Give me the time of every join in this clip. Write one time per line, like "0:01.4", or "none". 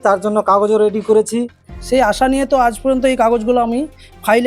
0:01.8